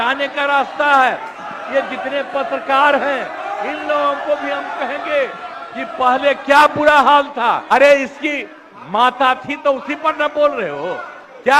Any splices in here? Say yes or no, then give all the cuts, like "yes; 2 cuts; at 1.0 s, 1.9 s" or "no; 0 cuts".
yes; 1 cut; at 7.6 s